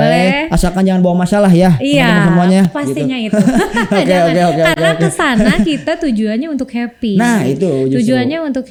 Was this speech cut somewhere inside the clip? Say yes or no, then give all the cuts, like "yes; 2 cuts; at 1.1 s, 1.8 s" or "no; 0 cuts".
no; 0 cuts